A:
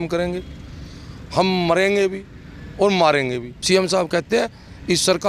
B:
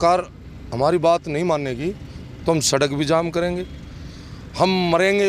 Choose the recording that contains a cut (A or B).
A